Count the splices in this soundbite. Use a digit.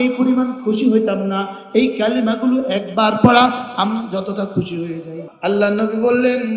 1